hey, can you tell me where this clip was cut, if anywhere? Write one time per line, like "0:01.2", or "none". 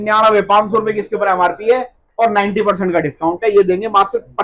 none